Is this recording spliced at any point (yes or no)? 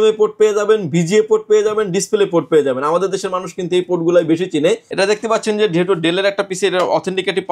yes